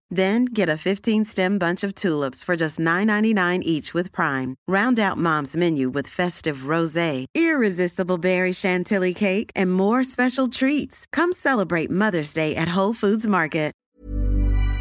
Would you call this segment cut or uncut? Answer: cut